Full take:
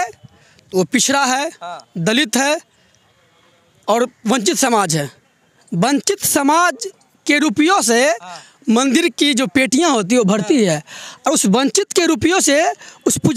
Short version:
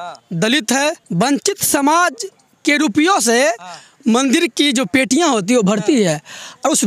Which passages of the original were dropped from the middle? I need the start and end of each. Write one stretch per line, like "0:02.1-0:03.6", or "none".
0:02.7-0:05.6